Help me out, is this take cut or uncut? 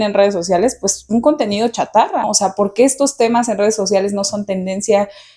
cut